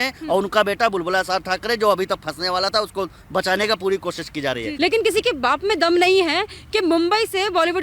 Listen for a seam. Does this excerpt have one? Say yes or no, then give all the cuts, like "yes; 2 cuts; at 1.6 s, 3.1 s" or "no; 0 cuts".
yes; 1 cut; at 4.7 s